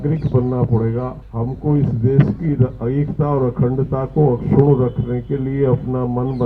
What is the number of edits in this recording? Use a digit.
1